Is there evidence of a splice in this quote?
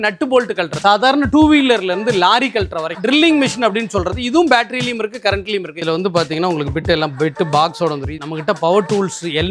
yes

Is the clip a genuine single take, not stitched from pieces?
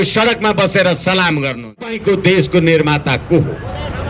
no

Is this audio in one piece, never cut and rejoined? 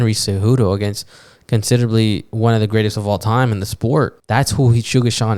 no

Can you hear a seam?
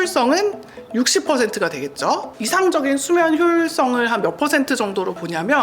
yes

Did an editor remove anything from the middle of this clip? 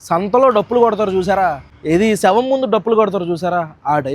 yes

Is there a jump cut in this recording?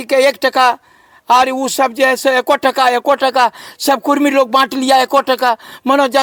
no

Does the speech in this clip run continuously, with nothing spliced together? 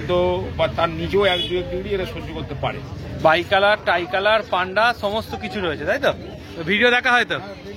no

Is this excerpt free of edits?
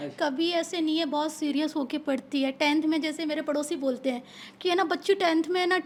yes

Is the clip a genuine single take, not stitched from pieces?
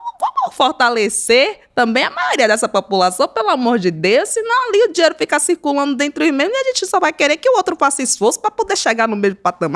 yes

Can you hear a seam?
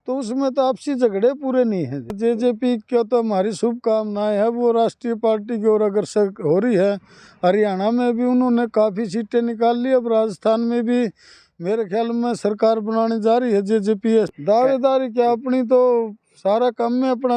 yes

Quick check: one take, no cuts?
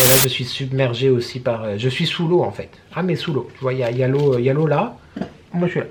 yes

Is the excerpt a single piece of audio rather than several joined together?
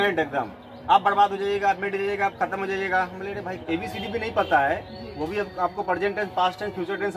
no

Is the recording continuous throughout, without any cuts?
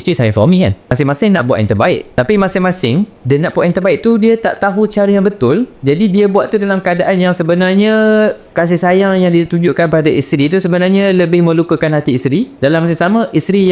no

